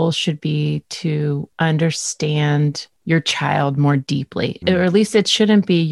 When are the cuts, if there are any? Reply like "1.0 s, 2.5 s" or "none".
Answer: 1.5 s, 2.9 s, 4.6 s